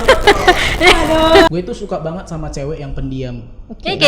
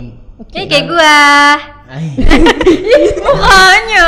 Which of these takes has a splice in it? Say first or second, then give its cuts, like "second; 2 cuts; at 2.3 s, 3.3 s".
first; 1 cut; at 1.5 s